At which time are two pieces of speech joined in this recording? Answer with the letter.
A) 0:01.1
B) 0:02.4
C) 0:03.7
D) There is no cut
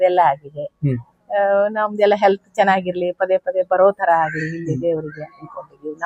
D